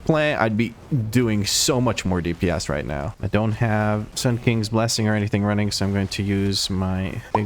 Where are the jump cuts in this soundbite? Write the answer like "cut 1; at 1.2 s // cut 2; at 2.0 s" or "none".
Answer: cut 1; at 3.1 s